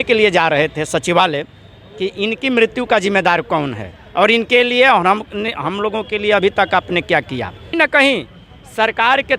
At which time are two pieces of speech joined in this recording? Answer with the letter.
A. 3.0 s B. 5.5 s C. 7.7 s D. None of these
C